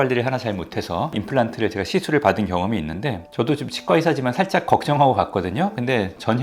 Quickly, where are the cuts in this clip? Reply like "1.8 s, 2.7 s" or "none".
1.2 s